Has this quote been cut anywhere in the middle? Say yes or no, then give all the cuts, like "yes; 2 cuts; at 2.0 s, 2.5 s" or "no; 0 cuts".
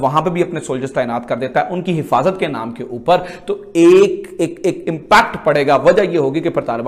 no; 0 cuts